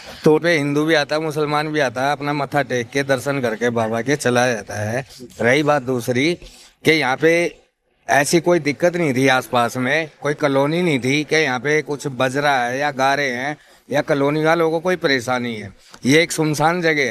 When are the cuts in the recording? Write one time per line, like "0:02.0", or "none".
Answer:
none